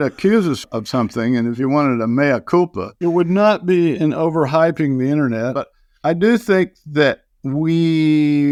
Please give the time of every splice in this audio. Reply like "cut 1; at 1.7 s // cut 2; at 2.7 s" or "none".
none